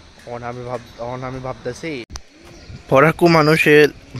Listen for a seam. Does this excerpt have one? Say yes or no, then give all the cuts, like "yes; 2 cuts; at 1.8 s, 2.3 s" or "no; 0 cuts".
yes; 1 cut; at 2.1 s